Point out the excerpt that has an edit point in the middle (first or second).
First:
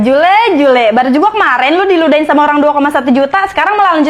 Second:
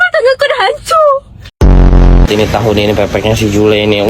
second